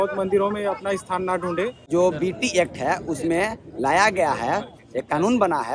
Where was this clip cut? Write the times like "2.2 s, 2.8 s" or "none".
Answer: 1.8 s